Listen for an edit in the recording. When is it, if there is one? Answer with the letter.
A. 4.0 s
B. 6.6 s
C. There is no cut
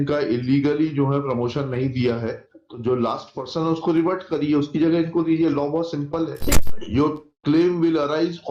B